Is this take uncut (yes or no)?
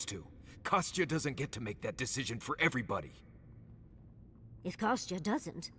no